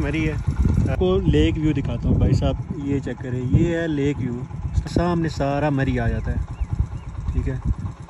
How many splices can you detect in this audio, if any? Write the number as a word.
two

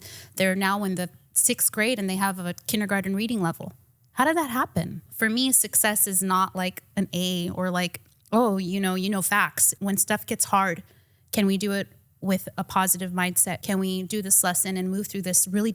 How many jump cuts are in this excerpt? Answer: three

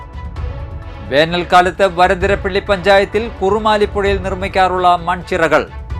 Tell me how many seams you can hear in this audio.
one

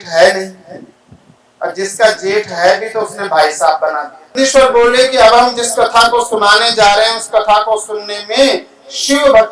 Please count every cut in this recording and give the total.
one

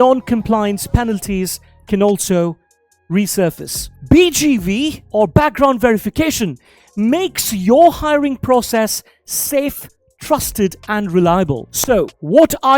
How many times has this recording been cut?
one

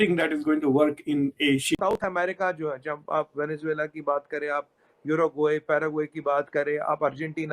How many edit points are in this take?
one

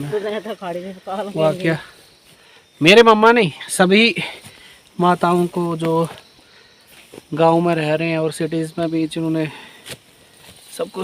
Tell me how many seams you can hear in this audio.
zero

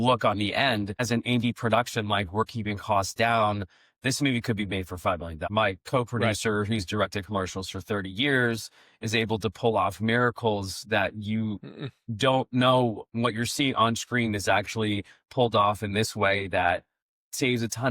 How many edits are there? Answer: two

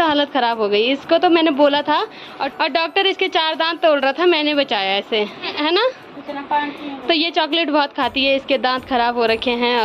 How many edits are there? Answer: zero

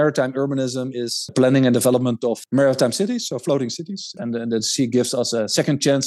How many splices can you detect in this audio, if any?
three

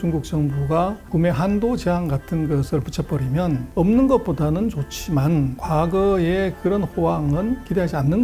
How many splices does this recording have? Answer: one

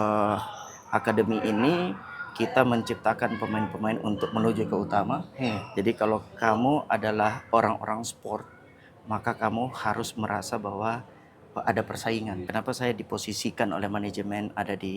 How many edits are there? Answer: one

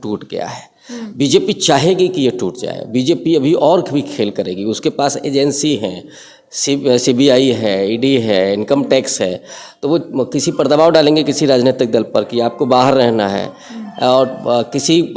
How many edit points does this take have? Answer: zero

